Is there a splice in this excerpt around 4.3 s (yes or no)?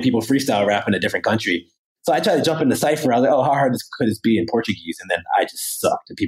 no